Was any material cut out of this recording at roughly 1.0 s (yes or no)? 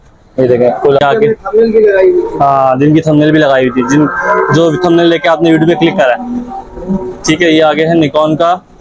yes